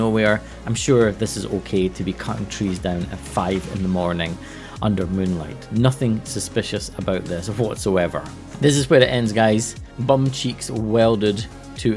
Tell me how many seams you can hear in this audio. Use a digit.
1